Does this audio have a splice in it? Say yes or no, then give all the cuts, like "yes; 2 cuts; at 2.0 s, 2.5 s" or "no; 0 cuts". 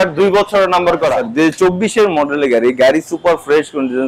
yes; 1 cut; at 1.2 s